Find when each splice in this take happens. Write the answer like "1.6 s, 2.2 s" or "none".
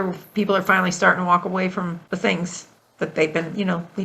2.0 s